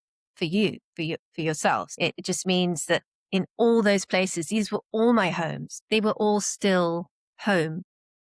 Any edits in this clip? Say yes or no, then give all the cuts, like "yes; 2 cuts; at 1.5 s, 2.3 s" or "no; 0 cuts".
yes; 2 cuts; at 1.9 s, 5.6 s